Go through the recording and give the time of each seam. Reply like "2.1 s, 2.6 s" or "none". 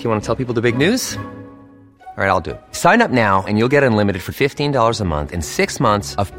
none

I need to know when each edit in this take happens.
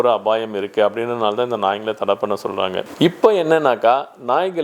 2.8 s

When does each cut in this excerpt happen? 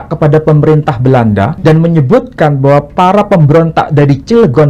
1.5 s

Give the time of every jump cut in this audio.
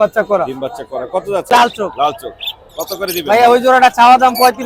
1.5 s

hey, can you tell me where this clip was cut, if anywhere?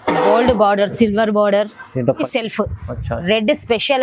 2.2 s

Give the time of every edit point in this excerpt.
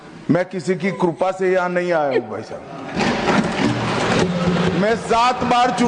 none

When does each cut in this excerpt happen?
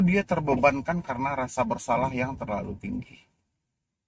none

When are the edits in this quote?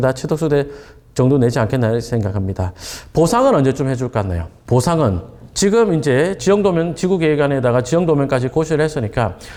none

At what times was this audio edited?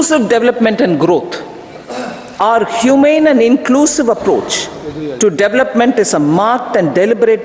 none

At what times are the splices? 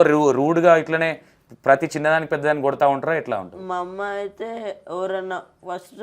none

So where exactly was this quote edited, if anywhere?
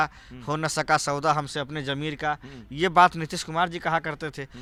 none

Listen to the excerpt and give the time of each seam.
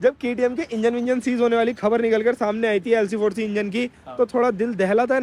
none

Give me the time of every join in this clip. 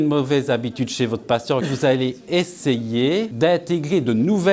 1.7 s, 3.3 s

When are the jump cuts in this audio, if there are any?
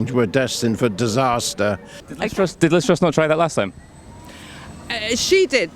2.0 s

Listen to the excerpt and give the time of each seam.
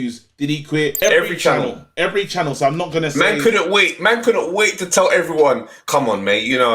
1.0 s

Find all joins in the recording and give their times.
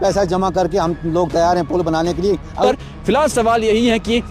2.6 s

